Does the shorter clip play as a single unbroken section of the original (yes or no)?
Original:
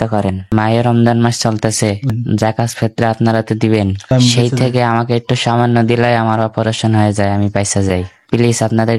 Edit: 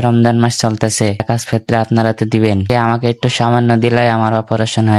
no